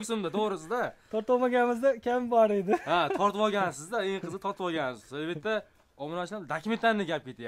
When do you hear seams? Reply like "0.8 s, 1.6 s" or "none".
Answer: none